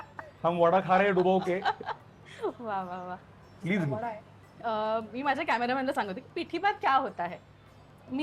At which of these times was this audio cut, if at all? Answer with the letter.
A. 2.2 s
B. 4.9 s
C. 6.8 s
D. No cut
D